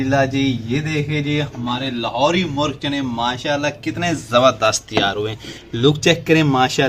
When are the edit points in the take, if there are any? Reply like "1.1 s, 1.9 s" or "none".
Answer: none